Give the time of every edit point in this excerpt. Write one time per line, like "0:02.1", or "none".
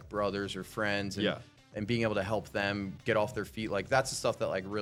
none